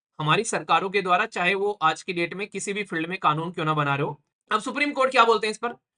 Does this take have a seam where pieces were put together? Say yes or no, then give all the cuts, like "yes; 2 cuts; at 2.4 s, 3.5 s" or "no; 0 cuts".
yes; 1 cut; at 4.3 s